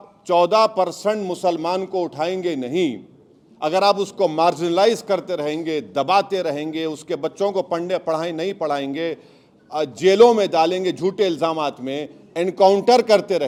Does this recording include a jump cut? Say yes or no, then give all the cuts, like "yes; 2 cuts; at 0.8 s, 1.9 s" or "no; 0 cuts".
no; 0 cuts